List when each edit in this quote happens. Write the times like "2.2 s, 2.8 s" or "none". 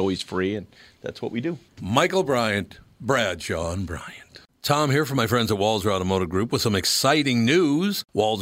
4.5 s